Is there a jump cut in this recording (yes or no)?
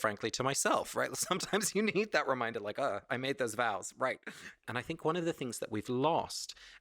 yes